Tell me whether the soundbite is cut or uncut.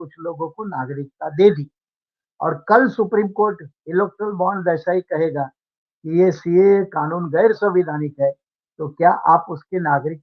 uncut